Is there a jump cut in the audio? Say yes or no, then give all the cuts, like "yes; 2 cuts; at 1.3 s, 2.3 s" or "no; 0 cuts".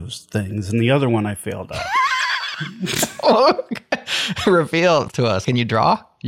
yes; 1 cut; at 5.1 s